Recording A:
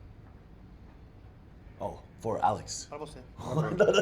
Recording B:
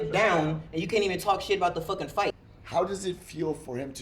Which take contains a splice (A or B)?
B